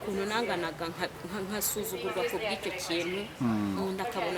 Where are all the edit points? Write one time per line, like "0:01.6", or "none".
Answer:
none